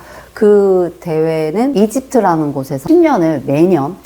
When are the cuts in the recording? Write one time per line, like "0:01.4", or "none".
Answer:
0:02.7